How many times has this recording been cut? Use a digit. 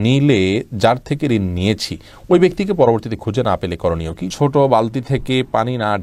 1